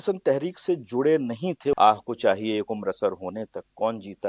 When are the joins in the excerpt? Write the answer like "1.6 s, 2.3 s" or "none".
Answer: 1.7 s